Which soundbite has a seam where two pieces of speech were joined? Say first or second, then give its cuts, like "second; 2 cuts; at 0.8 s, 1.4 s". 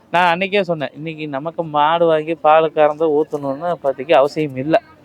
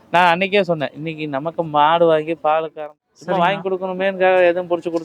second; 1 cut; at 2.7 s